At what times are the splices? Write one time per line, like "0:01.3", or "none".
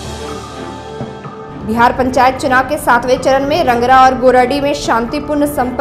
0:01.0